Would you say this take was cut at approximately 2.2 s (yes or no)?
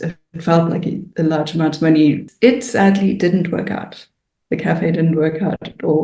yes